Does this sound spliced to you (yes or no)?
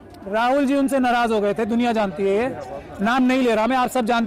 no